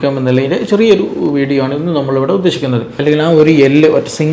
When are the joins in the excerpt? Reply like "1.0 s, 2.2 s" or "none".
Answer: 2.9 s